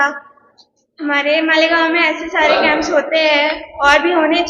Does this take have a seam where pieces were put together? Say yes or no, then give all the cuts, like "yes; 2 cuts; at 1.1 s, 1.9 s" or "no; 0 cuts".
no; 0 cuts